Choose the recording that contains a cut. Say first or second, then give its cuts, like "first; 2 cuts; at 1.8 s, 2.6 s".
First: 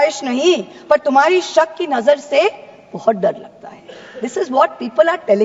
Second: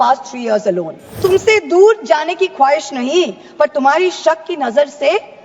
second; 1 cut; at 1.1 s